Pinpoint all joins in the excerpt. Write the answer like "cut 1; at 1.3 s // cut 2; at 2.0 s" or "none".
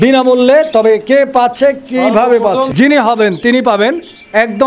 cut 1; at 2.8 s